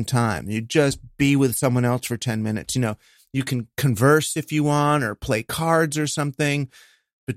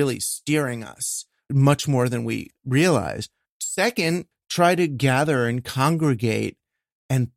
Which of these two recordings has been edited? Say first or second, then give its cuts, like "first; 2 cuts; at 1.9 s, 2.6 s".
second; 4 cuts; at 1.5 s, 2.5 s, 3.5 s, 4.3 s